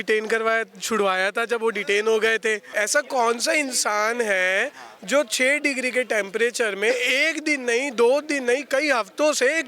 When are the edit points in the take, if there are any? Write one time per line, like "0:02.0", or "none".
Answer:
0:02.7